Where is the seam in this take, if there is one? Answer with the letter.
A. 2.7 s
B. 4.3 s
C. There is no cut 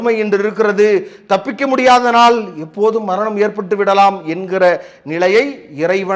C